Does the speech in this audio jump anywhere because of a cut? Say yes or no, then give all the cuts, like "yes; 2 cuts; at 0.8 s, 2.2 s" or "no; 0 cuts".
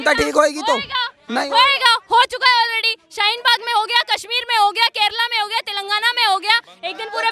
no; 0 cuts